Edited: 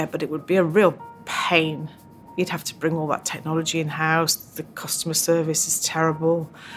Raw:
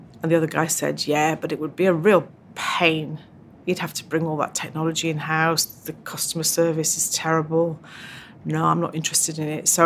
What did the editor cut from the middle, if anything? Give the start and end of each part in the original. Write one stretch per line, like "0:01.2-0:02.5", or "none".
none